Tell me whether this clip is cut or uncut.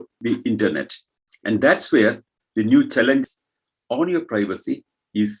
cut